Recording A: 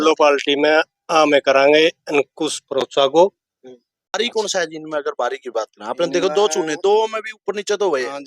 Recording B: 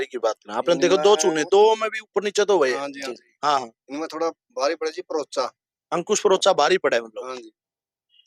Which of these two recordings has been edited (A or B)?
A